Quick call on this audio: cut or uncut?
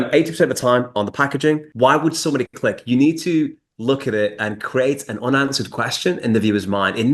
cut